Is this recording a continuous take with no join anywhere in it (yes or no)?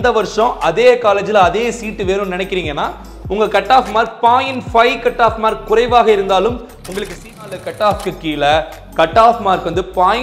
no